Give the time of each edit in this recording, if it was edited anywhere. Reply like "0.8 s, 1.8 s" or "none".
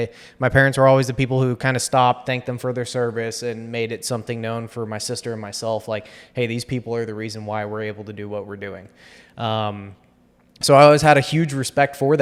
none